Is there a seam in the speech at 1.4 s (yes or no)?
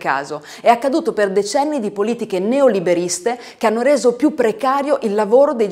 no